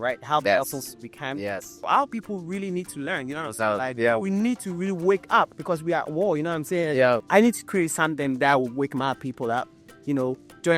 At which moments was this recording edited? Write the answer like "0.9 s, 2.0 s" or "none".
1.8 s, 7.2 s